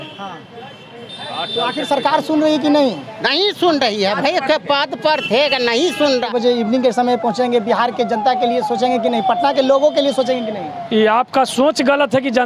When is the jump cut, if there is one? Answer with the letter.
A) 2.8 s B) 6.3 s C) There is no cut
B